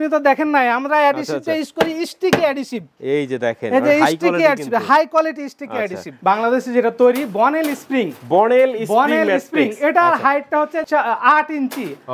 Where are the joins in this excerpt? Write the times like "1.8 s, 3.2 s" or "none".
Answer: 6.2 s, 10.8 s